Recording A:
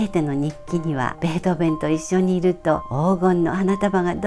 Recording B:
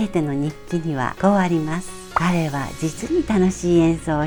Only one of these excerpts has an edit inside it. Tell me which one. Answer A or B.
A